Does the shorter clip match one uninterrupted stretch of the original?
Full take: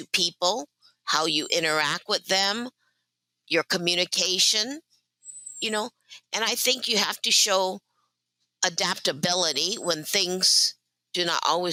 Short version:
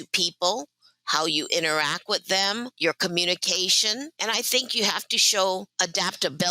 no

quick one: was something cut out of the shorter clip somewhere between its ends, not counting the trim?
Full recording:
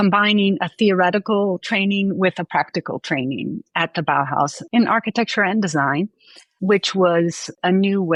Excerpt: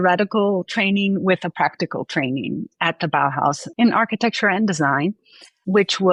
no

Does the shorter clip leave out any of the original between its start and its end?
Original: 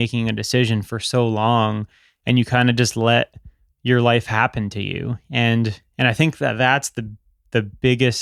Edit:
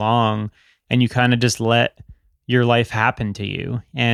no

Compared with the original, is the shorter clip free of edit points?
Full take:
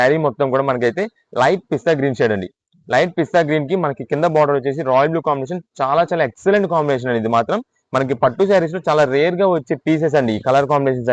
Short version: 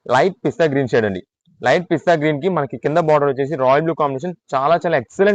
yes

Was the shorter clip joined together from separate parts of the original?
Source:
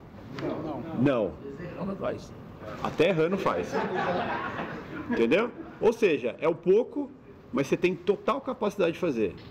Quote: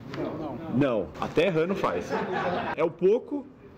yes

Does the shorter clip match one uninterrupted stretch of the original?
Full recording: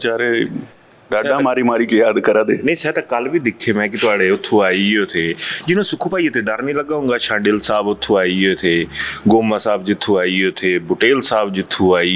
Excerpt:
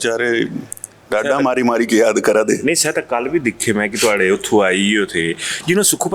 yes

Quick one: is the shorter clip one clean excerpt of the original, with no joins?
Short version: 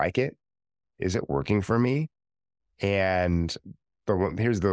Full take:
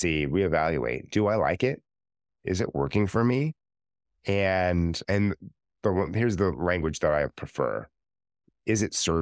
no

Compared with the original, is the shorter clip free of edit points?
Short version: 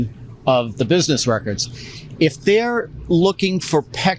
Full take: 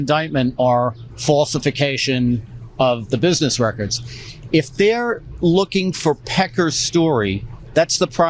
yes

